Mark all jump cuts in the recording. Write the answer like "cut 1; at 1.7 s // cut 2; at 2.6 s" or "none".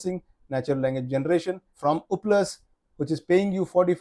cut 1; at 1.6 s